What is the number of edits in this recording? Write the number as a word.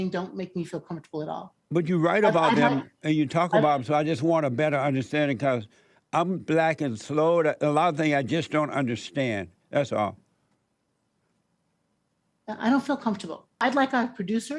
one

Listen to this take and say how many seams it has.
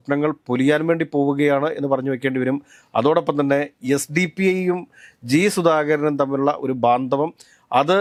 zero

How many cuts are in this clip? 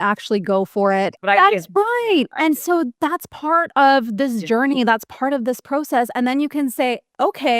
one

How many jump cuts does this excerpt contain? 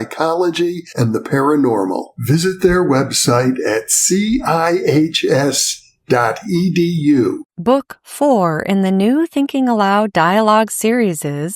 one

